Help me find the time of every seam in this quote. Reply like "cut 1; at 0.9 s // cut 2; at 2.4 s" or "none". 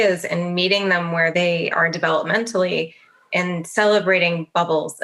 cut 1; at 1.3 s